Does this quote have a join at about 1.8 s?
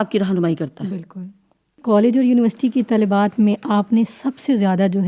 yes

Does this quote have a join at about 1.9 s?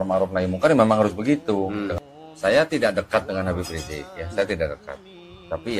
yes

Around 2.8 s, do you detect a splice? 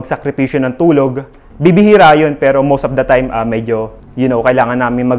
no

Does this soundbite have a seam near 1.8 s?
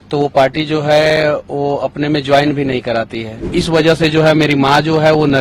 no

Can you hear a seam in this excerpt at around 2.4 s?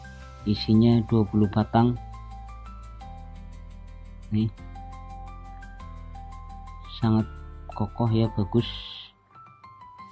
yes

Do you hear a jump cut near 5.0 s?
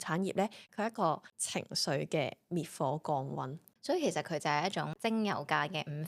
yes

